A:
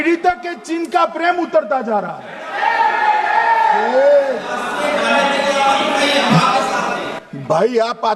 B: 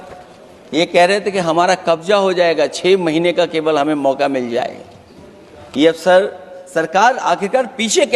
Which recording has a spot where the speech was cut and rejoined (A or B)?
A